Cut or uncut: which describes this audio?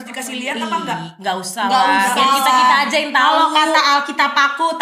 uncut